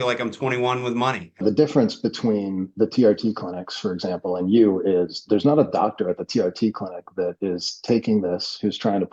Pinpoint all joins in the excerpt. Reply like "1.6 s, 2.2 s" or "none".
1.4 s